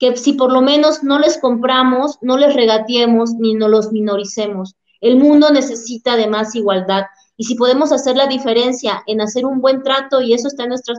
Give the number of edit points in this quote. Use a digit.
0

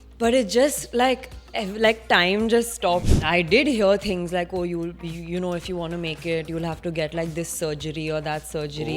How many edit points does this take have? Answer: 1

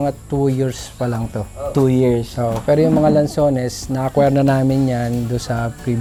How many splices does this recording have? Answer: 0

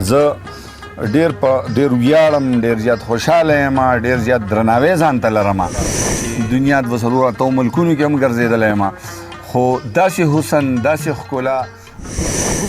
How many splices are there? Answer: 1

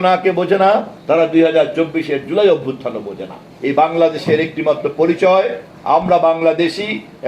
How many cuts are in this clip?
2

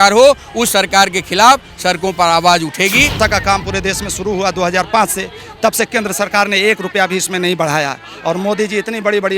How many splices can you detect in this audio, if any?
1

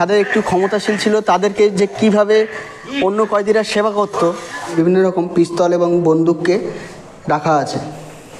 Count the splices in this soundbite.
1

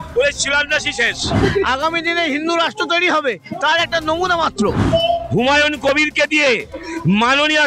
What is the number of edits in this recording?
2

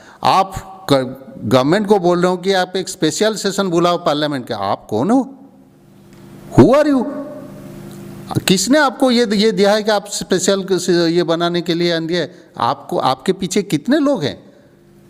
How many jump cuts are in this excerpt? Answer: 0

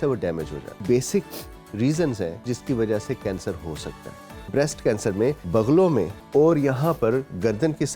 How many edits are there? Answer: 5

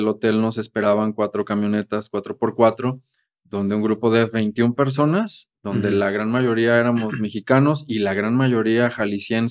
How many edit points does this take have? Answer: 0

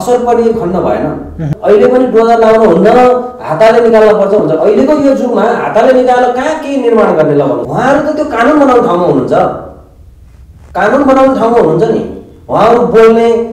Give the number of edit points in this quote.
2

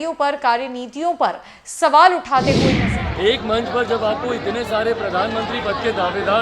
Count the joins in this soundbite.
1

